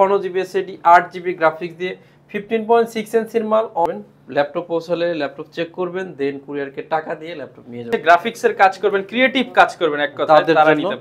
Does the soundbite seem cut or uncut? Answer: cut